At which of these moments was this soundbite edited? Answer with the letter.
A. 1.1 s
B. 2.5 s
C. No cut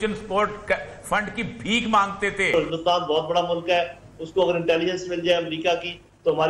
B